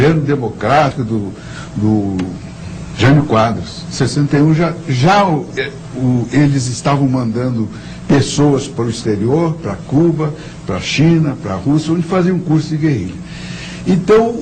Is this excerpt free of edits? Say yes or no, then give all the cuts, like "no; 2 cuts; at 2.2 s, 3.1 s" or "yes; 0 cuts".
no; 1 cut; at 12.4 s